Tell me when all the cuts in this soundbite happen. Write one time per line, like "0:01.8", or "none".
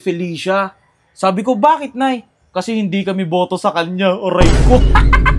none